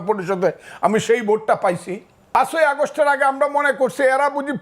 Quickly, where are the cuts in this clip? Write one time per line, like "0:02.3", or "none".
0:02.3